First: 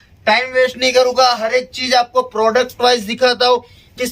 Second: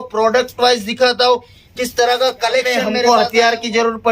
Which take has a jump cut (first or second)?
second